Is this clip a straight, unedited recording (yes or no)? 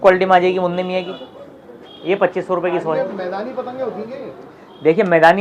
yes